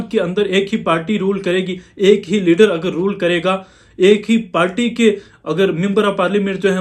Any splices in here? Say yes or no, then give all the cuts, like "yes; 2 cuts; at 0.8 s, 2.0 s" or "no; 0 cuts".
no; 0 cuts